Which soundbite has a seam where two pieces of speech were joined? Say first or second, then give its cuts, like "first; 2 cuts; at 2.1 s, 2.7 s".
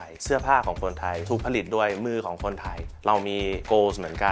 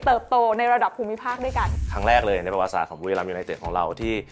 second; 1 cut; at 1.8 s